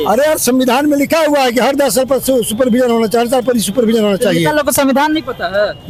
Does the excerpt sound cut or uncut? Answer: uncut